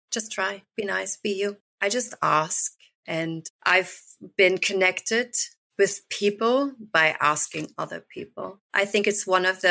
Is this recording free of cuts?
no; 3 cuts; at 1.7 s, 3.3 s, 8.6 s

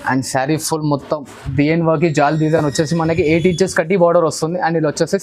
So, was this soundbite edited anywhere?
no; 0 cuts

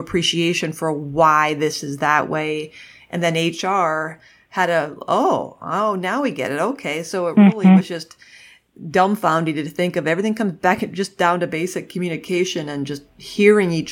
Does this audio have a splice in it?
no; 0 cuts

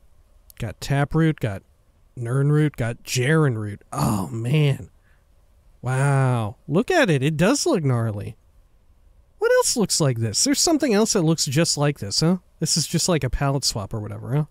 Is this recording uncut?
yes; 0 cuts

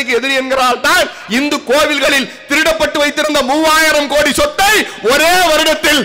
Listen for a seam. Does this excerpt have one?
no; 0 cuts

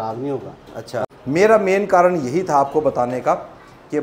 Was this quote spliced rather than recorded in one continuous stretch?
yes; 1 cut; at 1.1 s

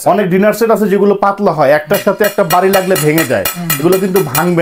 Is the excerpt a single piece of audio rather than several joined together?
yes; 0 cuts

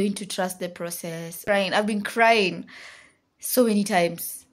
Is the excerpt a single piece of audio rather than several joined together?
no; 1 cut; at 1.4 s

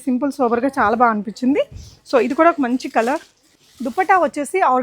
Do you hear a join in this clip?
yes; 1 cut; at 3.5 s

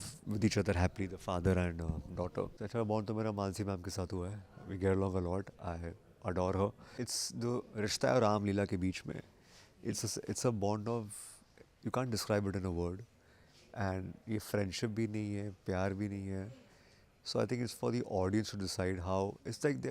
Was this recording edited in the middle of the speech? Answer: yes; 2 cuts; at 2.6 s, 6.8 s

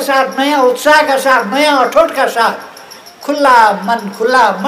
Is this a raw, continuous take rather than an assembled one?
yes; 0 cuts

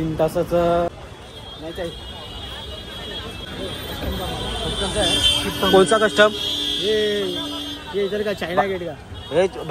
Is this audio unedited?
no; 2 cuts; at 0.9 s, 3.4 s

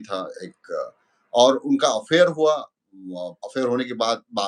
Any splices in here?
no; 0 cuts

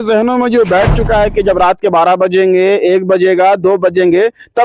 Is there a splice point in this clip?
no; 0 cuts

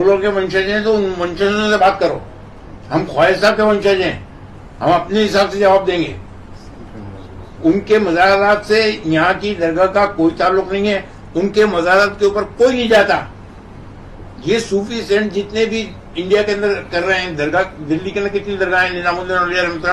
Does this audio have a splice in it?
no; 0 cuts

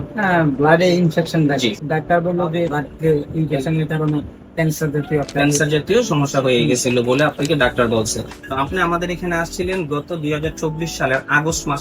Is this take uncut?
no; 3 cuts; at 1.8 s, 2.8 s, 8.4 s

